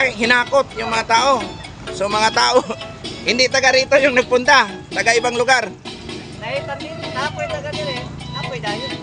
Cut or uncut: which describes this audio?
uncut